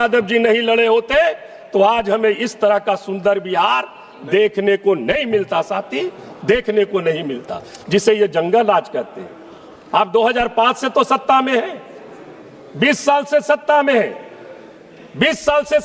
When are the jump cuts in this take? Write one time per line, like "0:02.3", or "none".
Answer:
none

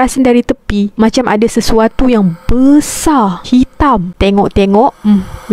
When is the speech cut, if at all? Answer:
0:04.1

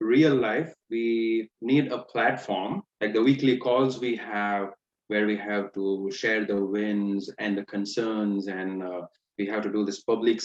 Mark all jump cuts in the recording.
0:02.8

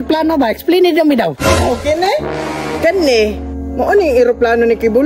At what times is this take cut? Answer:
none

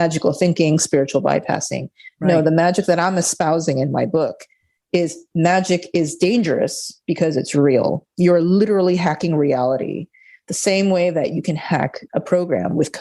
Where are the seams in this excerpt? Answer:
0:12.0

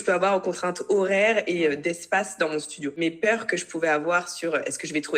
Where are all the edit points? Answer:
0:03.0

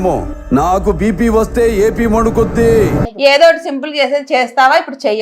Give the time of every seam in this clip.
0:03.0

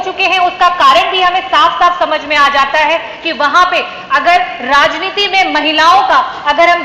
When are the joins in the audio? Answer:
none

